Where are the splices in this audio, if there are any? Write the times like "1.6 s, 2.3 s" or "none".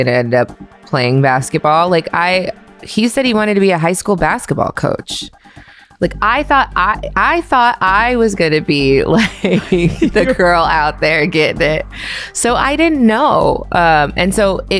none